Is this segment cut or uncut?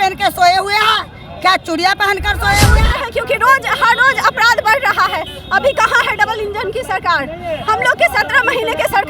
cut